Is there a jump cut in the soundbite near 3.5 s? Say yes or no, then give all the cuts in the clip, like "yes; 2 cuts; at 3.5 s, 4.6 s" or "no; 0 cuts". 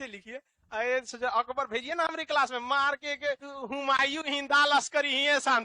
yes; 1 cut; at 3.5 s